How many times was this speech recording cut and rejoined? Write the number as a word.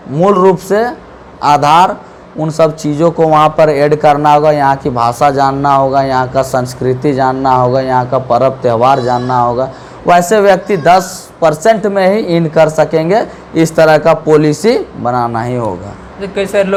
zero